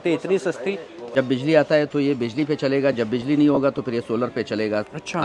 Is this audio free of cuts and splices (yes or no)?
no